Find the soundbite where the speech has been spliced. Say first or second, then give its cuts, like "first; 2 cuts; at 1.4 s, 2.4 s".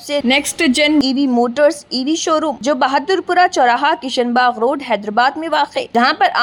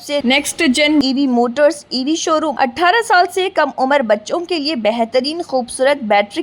second; 1 cut; at 2.5 s